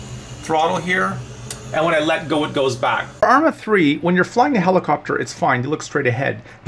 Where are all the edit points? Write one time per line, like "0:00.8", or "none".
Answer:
0:03.1